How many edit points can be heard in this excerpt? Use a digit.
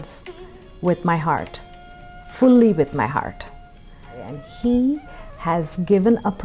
1